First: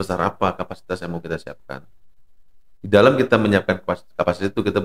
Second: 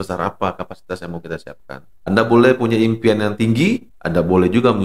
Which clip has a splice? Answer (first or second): second